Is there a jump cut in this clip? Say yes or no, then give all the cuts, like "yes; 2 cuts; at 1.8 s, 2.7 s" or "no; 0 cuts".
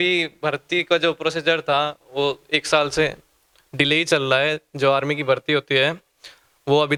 no; 0 cuts